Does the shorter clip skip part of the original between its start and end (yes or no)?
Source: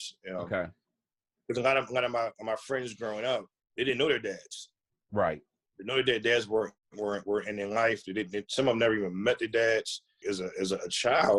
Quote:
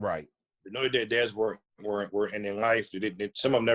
no